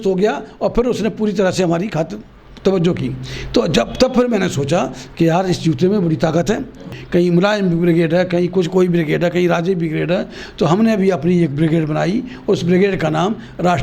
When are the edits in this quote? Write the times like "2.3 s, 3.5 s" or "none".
6.9 s